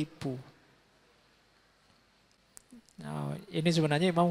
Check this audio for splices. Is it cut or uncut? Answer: uncut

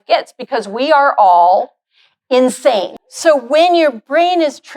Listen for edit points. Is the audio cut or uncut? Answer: cut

